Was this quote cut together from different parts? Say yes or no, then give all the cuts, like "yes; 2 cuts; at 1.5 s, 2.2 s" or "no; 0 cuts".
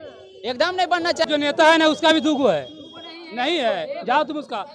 yes; 1 cut; at 1.2 s